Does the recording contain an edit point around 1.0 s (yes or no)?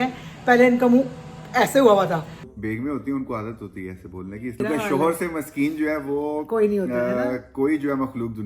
no